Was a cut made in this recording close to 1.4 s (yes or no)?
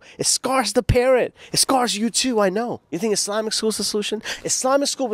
no